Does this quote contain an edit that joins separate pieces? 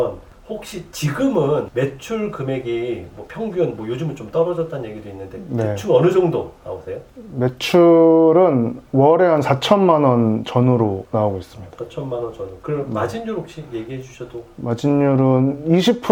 no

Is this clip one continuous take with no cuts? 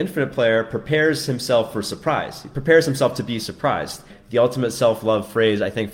no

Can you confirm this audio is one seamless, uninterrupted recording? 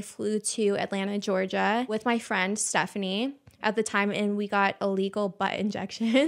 yes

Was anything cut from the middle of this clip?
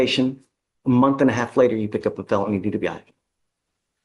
no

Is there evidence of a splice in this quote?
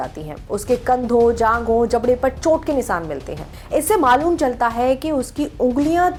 no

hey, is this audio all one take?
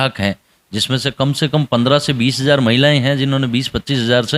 yes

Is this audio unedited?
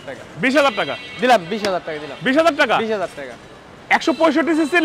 yes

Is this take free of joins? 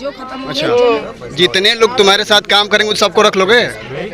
no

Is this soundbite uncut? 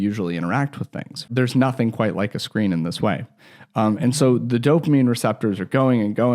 no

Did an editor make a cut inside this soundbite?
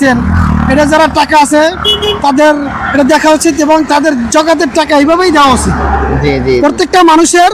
no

